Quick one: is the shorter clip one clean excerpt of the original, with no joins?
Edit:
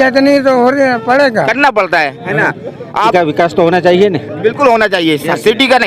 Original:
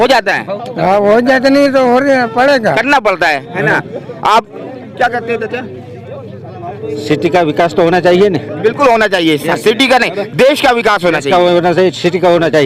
no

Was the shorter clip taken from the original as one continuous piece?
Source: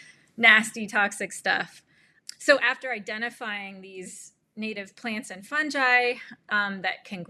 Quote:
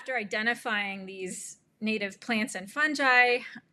yes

